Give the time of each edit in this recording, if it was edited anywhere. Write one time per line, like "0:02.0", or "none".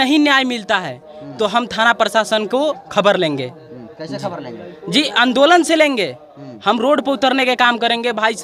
none